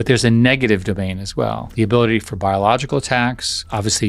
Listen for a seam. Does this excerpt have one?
yes; 1 cut; at 1.6 s

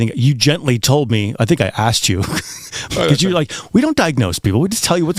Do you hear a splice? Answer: no; 0 cuts

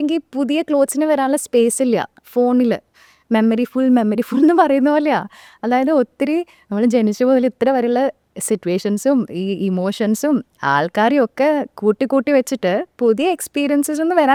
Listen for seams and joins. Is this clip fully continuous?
yes; 0 cuts

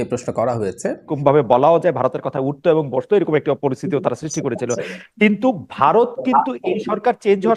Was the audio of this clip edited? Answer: yes; 1 cut; at 1.1 s

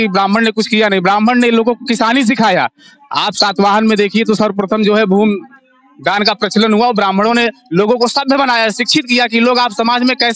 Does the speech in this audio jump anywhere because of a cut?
no; 0 cuts

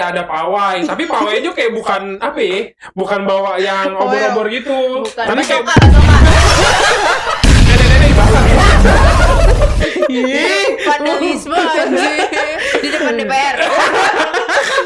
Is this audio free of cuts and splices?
yes; 0 cuts

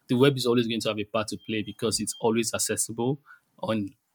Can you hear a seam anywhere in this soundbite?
no; 0 cuts

